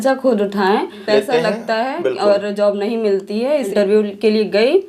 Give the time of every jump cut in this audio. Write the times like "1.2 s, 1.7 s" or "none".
0.9 s, 3.7 s